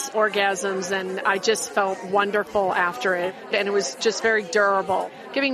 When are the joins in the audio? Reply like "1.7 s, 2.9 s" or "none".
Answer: 3.5 s